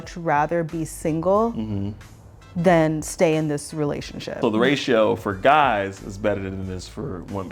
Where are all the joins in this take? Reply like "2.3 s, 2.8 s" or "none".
4.3 s